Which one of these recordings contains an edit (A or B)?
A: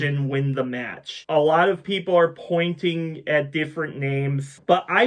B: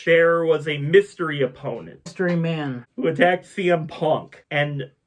B